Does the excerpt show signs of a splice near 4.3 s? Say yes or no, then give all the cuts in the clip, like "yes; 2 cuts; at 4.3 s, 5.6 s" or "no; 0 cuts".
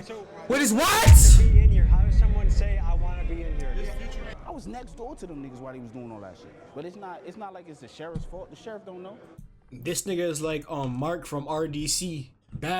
yes; 1 cut; at 4.3 s